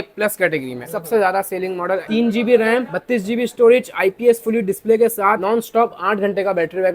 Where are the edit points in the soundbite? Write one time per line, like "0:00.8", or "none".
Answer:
0:00.8
0:02.0
0:05.4

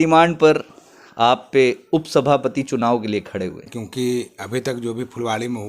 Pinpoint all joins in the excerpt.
0:03.7

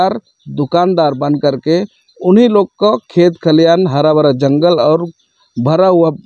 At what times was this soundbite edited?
none

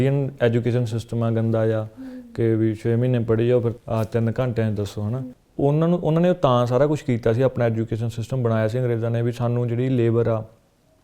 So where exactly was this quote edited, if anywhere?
0:03.8
0:05.1

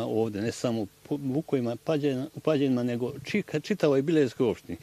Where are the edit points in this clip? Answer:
none

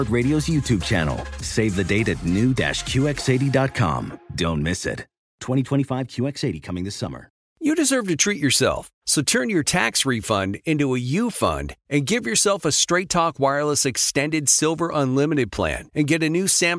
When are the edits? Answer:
0:07.4

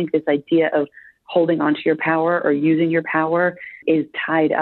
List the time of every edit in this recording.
0:03.7

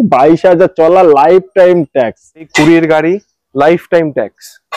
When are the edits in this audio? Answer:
0:02.5

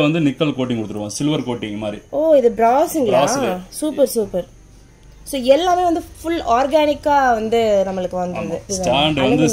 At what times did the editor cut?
none

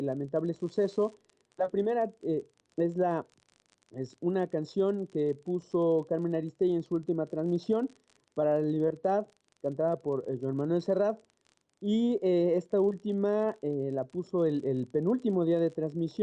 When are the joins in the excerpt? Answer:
0:05.7

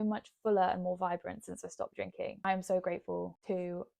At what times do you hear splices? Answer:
0:02.4

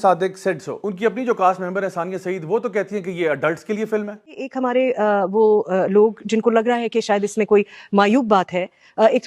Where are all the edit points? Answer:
0:00.9

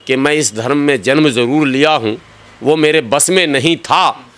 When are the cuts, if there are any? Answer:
none

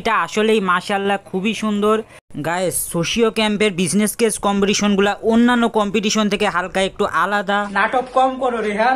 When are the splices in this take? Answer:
0:02.3
0:07.7

